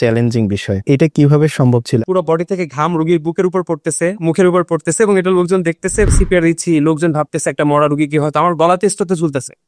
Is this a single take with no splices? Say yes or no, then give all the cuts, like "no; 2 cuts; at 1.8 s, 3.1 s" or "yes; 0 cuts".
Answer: no; 3 cuts; at 0.8 s, 2.0 s, 6.1 s